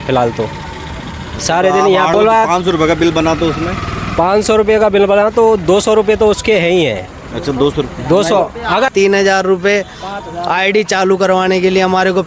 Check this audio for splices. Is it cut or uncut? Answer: cut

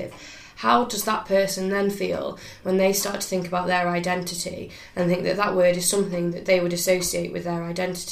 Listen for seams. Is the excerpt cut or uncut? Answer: uncut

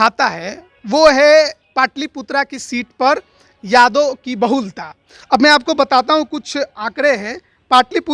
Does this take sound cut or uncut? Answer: uncut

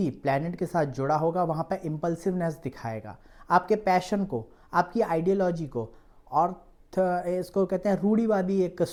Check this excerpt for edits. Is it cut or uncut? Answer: uncut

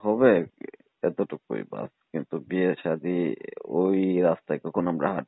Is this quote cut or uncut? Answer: uncut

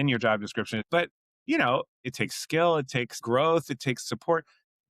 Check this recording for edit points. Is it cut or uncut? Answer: cut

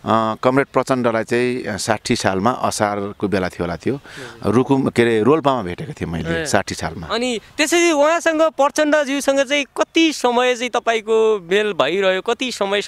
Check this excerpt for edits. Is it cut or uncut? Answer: uncut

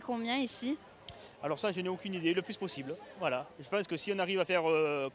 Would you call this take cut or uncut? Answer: cut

